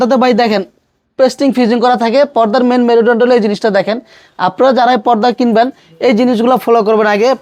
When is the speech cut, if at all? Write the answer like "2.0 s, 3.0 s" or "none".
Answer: none